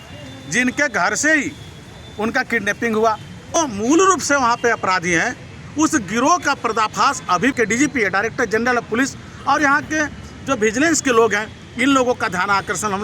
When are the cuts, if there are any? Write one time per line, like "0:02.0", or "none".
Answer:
0:03.6
0:07.5